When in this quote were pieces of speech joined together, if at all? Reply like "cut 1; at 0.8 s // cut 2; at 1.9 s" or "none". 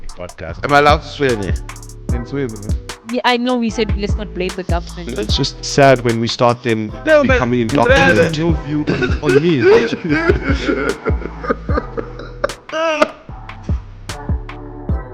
cut 1; at 13.3 s